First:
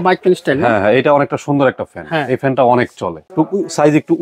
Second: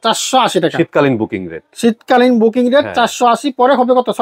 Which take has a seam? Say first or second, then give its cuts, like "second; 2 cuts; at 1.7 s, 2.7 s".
first; 1 cut; at 3.2 s